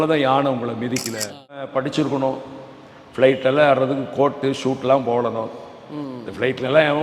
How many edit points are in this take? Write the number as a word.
one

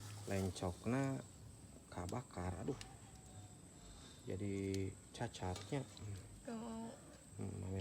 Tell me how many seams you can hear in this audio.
zero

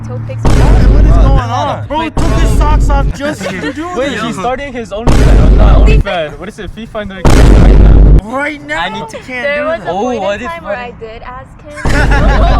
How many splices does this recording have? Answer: two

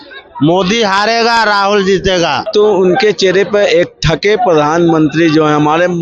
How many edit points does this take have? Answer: one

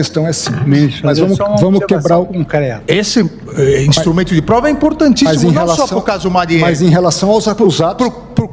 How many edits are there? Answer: one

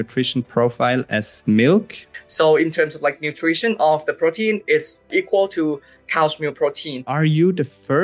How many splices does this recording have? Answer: four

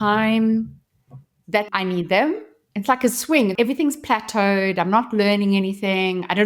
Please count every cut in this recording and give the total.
three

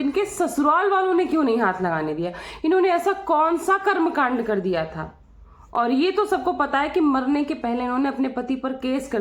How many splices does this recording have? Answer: zero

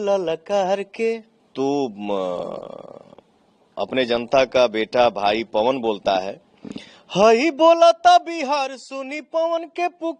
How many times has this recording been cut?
one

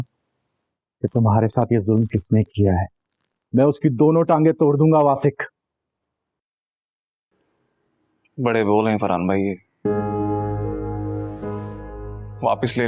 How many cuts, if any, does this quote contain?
zero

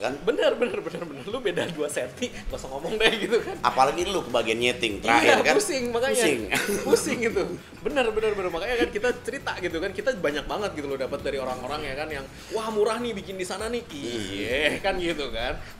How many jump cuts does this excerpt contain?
zero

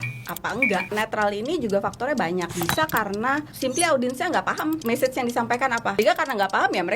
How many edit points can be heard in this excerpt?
five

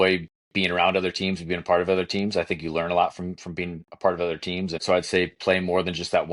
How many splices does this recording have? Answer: one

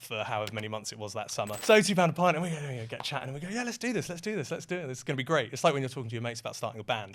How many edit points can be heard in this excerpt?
one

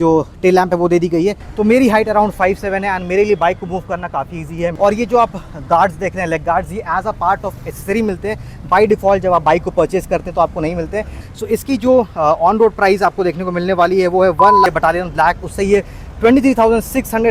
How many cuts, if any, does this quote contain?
four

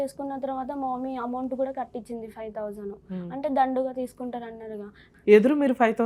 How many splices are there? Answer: one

